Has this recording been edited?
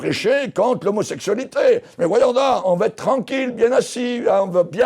yes; 1 cut; at 2.6 s

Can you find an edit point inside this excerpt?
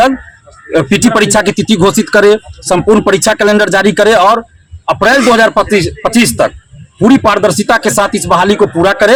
no; 0 cuts

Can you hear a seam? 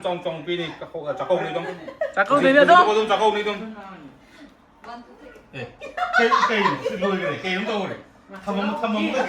yes; 1 cut; at 3.7 s

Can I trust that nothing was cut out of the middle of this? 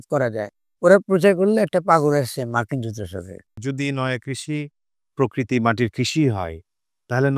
no; 1 cut; at 3.4 s

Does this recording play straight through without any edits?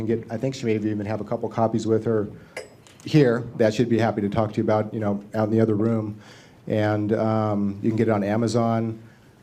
yes; 0 cuts

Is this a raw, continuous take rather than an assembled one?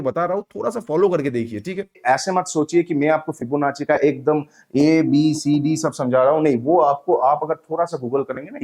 no; 1 cut; at 2.0 s

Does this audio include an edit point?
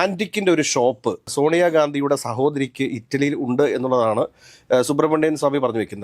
yes; 1 cut; at 1.2 s

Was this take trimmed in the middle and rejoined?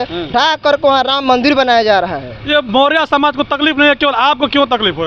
no; 0 cuts

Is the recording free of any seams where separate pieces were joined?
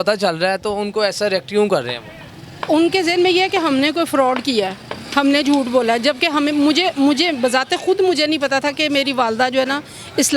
yes; 0 cuts

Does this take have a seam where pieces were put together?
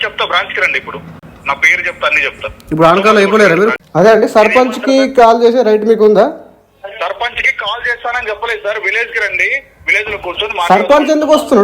yes; 1 cut; at 3.8 s

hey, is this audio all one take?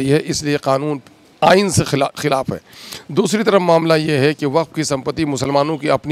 yes; 0 cuts

